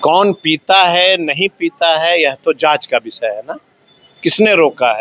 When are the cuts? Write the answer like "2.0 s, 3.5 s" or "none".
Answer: none